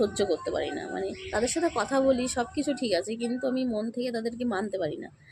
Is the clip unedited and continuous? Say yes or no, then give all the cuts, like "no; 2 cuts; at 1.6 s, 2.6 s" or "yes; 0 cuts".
yes; 0 cuts